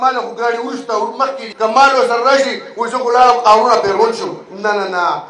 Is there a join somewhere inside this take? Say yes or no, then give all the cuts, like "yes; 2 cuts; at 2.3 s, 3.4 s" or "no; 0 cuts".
yes; 1 cut; at 1.4 s